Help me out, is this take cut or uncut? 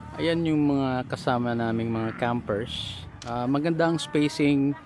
uncut